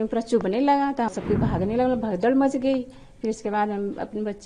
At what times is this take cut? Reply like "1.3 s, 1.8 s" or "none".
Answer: 1.1 s